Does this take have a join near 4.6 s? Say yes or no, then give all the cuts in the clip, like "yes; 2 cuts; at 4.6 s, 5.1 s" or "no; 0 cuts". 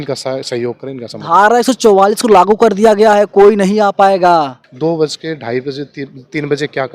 yes; 1 cut; at 4.6 s